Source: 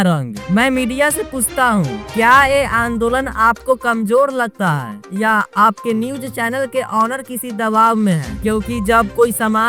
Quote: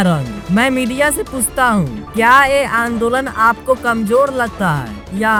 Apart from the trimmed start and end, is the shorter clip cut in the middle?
no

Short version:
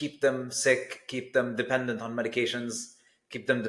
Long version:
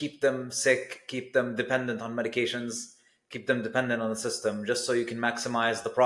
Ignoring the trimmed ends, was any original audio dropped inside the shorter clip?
no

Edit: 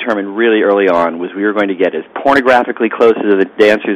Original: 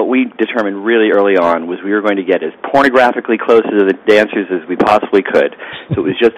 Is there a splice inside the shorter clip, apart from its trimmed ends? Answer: no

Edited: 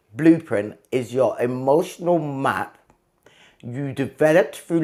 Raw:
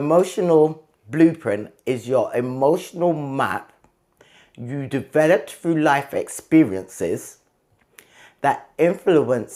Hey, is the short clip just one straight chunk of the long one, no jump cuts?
yes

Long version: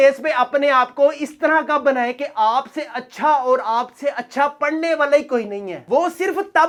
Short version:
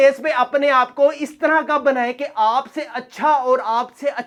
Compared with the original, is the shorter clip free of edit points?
yes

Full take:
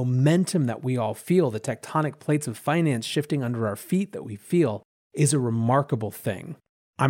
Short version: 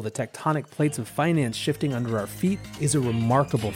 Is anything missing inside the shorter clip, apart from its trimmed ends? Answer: yes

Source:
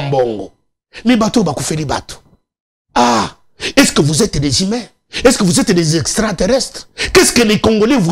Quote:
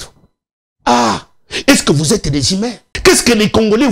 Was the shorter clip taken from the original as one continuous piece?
no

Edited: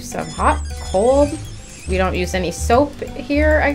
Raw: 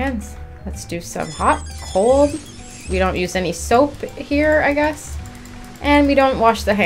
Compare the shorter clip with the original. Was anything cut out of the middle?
no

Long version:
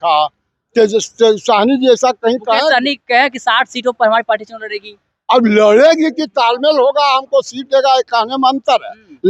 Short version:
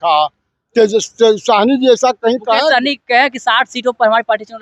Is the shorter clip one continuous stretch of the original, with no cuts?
yes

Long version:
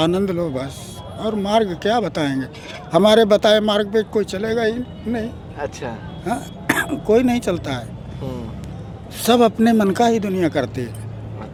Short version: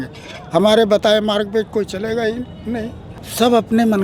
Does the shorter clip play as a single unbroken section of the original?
no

